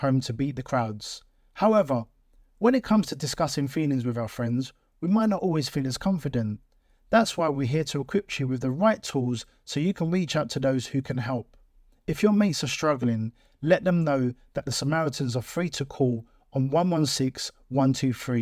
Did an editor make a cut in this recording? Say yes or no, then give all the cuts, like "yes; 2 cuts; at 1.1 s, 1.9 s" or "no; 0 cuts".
no; 0 cuts